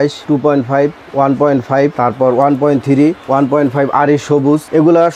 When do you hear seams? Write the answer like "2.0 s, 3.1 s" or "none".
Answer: none